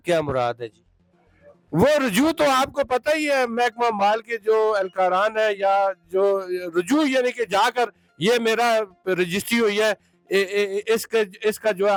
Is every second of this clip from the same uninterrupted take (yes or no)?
yes